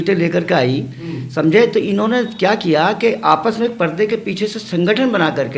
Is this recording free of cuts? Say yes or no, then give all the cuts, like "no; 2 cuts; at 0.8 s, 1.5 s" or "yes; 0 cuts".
yes; 0 cuts